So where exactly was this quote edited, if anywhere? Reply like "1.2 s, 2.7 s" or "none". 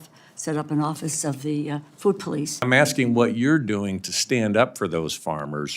2.7 s